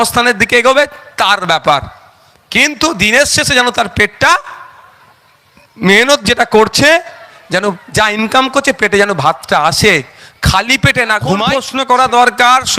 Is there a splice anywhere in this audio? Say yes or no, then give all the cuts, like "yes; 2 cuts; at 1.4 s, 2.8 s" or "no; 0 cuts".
yes; 1 cut; at 11.6 s